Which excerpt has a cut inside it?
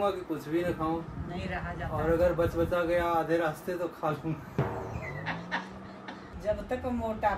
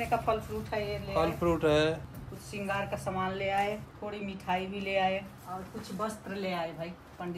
second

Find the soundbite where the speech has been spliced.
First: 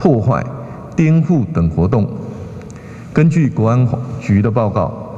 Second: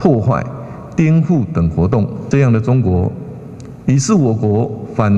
second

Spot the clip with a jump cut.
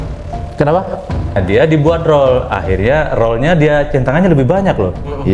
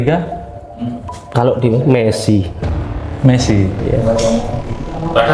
first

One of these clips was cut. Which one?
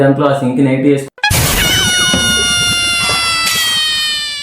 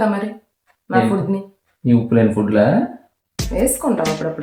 first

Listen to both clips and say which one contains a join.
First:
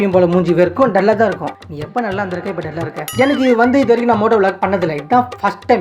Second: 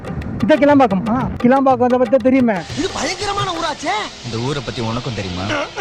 first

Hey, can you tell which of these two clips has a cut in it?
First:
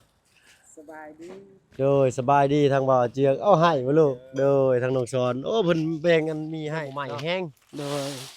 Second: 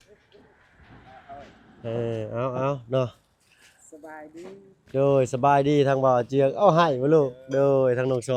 first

